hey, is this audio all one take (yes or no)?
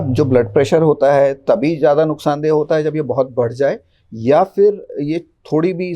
yes